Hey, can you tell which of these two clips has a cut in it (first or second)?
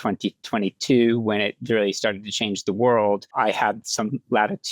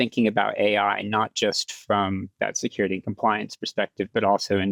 first